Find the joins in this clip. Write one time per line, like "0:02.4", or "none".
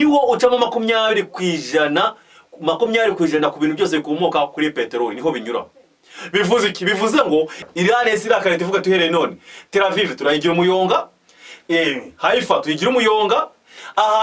0:07.6